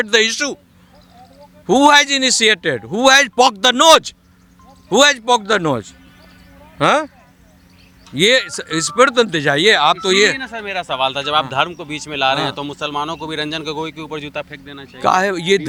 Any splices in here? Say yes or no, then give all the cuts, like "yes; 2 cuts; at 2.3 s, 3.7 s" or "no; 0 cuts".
no; 0 cuts